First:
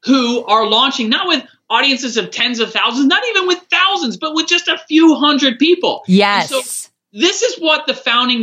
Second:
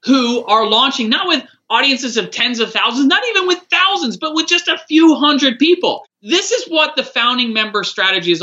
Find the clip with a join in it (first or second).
second